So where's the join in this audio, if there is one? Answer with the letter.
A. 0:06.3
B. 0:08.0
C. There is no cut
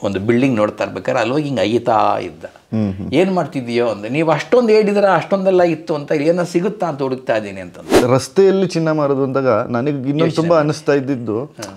B